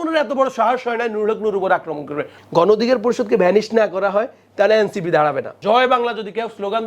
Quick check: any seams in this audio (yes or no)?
yes